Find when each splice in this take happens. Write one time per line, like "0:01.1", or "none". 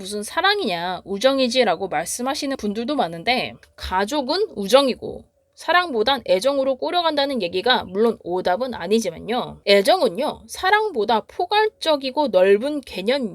0:03.5